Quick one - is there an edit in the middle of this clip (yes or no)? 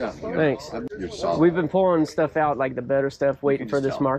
yes